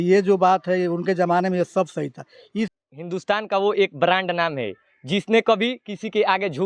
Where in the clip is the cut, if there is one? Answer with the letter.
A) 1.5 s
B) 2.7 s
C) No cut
B